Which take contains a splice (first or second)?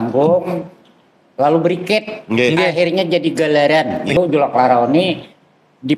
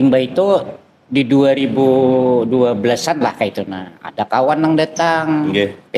first